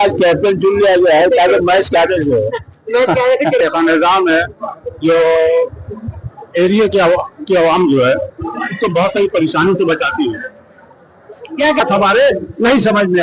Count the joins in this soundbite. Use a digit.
2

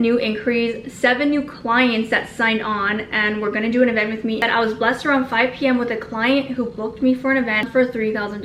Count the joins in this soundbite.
2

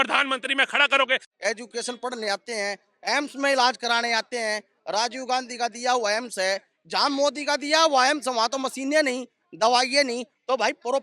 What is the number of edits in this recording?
1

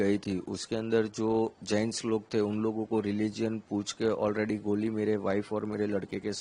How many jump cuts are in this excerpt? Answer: 0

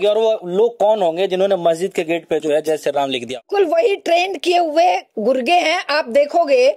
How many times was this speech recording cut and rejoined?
1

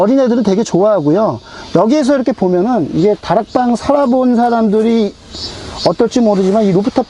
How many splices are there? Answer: 0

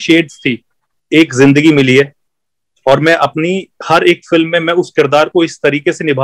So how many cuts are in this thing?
1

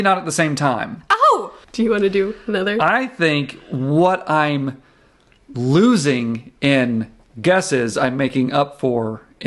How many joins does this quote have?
1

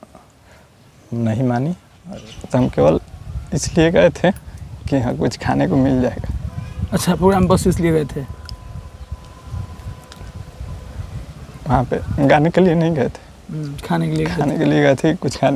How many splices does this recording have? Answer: 1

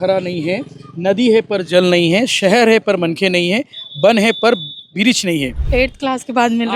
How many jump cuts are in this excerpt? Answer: 1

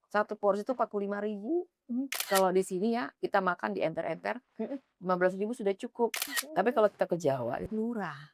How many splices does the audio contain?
2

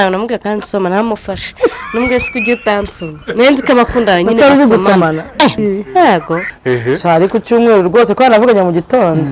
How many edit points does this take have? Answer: 2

